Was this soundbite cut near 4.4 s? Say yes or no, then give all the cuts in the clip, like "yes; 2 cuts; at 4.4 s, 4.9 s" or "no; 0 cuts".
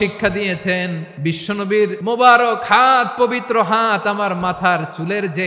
no; 2 cuts; at 1.1 s, 2.0 s